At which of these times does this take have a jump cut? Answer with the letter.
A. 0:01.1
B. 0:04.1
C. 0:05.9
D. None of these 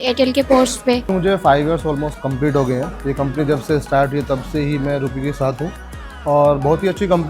A